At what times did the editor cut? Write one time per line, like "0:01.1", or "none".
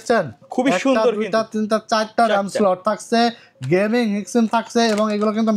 none